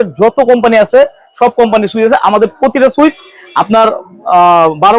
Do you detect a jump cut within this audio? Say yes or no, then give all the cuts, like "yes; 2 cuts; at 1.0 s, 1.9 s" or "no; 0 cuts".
no; 0 cuts